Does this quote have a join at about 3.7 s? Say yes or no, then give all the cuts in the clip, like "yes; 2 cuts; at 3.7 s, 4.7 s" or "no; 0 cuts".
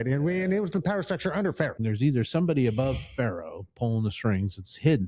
no; 1 cut; at 1.8 s